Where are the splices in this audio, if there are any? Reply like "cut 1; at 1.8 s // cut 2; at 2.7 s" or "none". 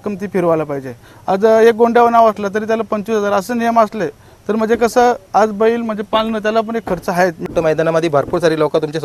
cut 1; at 7.5 s